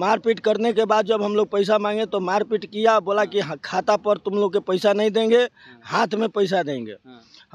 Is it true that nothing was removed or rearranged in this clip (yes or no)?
yes